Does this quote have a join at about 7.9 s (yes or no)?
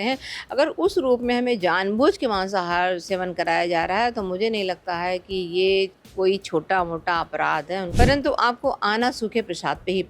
yes